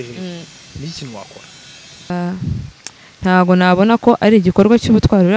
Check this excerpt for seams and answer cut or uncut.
cut